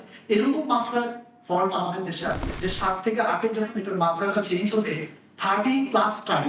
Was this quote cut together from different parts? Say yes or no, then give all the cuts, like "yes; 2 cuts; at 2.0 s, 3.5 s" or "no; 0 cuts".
yes; 1 cut; at 2.5 s